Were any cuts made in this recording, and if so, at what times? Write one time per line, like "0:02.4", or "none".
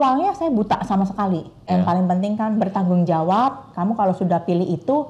0:01.7